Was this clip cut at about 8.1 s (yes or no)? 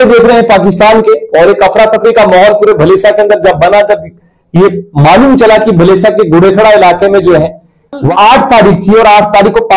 yes